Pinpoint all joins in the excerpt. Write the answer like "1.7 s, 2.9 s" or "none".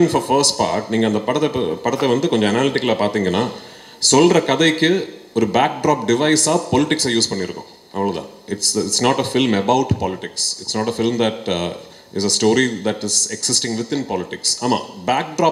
none